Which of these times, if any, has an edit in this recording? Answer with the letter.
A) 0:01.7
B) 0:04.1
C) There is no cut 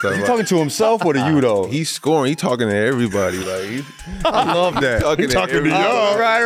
A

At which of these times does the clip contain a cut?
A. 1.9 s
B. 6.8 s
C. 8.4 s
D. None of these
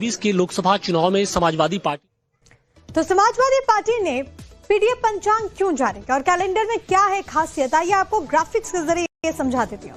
D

